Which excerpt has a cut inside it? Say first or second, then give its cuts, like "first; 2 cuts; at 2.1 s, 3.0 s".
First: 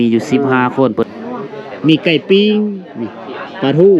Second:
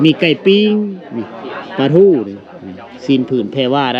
first; 1 cut; at 0.9 s